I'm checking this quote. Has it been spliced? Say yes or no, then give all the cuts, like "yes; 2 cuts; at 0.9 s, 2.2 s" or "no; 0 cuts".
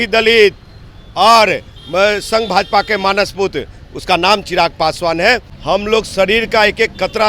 yes; 1 cut; at 5.5 s